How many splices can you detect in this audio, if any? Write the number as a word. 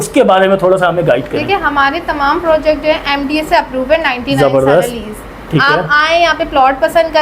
zero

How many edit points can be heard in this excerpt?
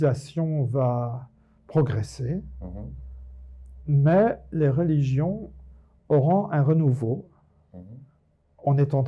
one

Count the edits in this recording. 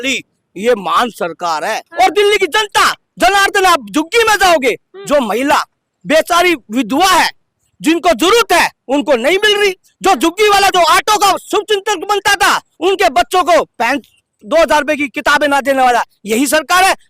one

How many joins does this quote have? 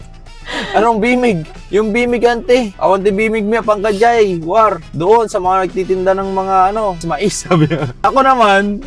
two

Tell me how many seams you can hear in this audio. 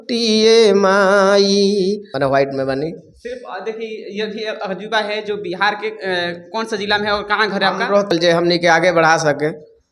two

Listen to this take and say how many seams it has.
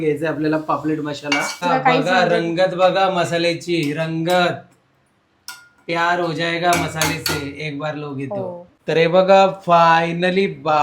two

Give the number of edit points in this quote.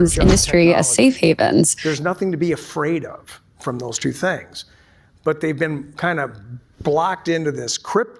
one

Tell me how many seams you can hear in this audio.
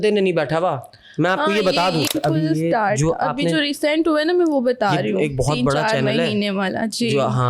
one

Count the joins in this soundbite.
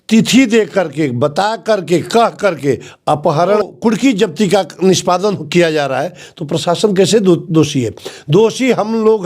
one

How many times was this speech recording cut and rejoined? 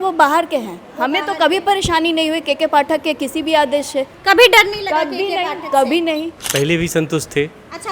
one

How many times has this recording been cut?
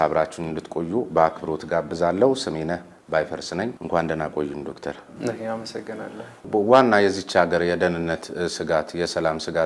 one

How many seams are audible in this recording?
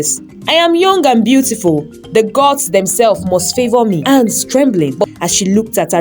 one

